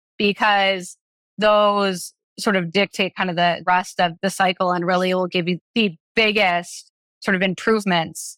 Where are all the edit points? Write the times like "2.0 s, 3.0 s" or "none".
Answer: 5.6 s